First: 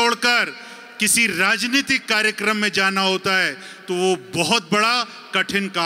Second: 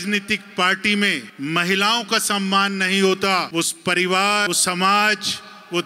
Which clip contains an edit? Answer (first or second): second